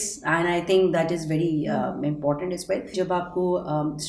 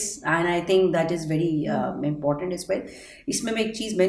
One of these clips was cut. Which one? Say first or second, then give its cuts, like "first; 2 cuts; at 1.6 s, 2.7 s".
first; 1 cut; at 2.9 s